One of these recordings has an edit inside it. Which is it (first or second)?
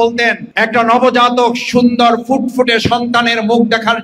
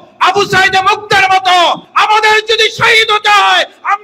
second